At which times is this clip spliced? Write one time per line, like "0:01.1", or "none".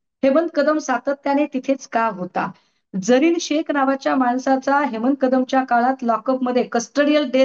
none